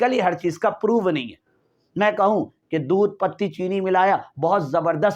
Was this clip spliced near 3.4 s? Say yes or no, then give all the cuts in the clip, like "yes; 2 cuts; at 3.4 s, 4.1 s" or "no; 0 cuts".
no; 0 cuts